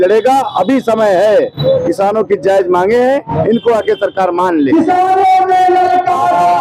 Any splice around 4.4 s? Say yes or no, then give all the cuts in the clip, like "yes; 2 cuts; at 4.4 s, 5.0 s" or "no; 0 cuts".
no; 0 cuts